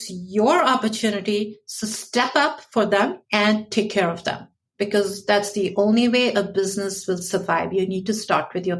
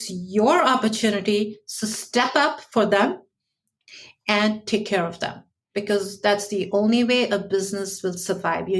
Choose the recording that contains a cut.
first; 1 cut; at 3.2 s

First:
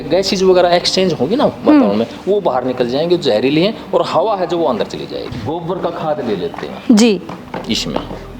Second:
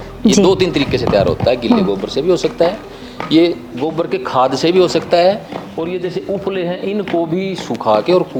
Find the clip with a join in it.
first; 1 cut; at 5.2 s

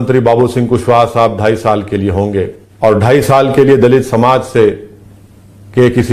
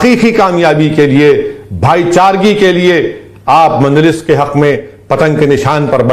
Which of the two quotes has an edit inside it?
first; 1 cut; at 2.6 s

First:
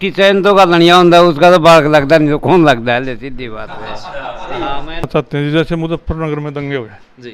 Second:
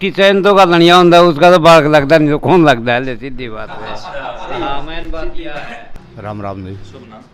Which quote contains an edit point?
first; 1 cut; at 5.1 s

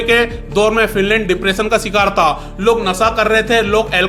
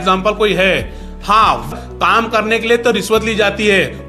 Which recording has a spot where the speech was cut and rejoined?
second; 1 cut; at 1.7 s

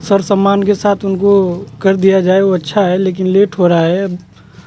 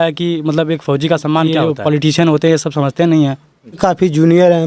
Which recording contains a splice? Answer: second; 2 cuts; at 1.5 s, 3.8 s

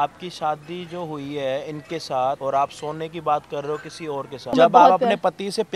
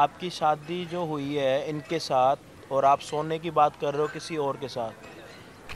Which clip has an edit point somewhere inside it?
first; 2 cuts; at 2.4 s, 4.5 s

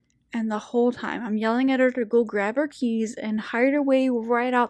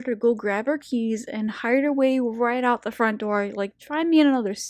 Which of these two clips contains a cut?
second; 1 cut; at 3.8 s

